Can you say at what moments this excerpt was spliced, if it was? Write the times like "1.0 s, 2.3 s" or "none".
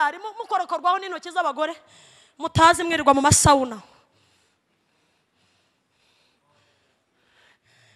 none